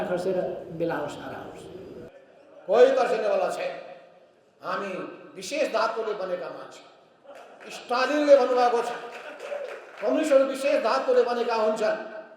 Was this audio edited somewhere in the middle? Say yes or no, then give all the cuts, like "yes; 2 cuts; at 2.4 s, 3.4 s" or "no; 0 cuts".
yes; 1 cut; at 2.1 s